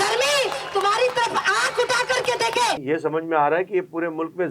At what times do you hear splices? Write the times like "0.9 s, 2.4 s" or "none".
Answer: 2.8 s

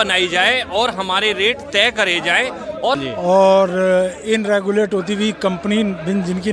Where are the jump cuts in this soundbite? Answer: 3.0 s

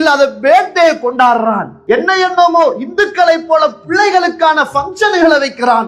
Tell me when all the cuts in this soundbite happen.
none

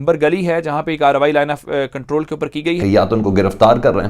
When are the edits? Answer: 2.8 s

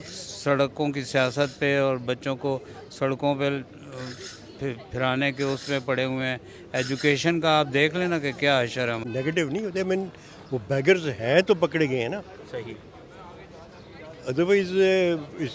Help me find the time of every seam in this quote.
9.0 s

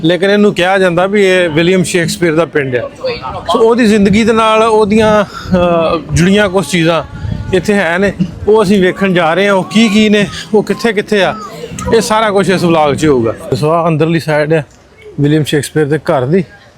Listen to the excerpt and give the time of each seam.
13.5 s

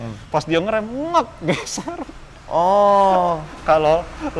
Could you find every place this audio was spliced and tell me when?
none

